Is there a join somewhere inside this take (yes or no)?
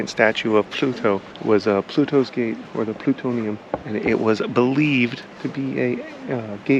yes